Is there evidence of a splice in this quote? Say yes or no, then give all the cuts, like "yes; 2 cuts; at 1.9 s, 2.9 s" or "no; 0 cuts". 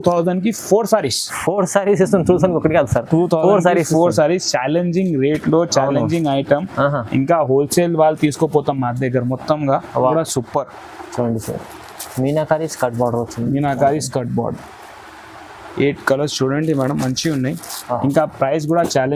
yes; 1 cut; at 10.1 s